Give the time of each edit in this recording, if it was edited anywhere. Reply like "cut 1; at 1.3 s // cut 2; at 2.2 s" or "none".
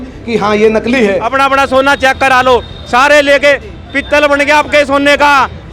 cut 1; at 1.3 s

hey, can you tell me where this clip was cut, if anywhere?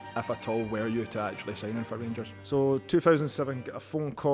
none

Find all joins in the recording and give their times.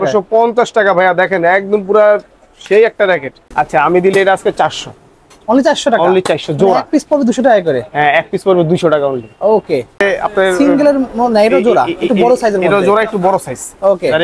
cut 1; at 3.4 s // cut 2; at 10.0 s

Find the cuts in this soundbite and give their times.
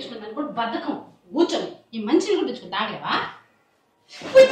none

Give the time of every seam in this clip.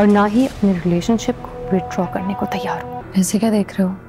cut 1; at 3.0 s

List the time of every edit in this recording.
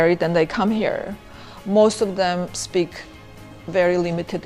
none

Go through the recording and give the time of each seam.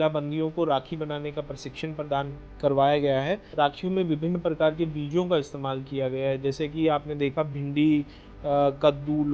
cut 1; at 3.4 s

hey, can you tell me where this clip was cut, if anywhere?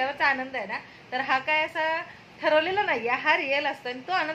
none

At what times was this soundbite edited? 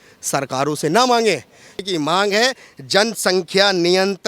cut 1; at 1.8 s

